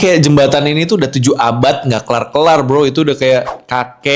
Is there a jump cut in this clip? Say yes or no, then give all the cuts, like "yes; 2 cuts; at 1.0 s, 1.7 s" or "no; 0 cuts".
no; 0 cuts